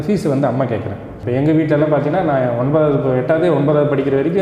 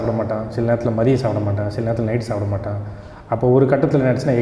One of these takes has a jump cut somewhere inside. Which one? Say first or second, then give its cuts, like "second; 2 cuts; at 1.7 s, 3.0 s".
first; 1 cut; at 1.1 s